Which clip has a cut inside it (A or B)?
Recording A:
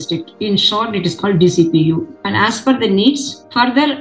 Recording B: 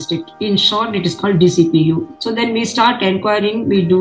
A